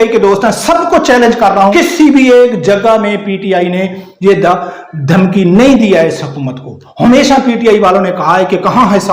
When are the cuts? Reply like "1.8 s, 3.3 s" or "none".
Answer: 1.7 s